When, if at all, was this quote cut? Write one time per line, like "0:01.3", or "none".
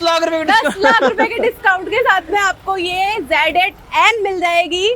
none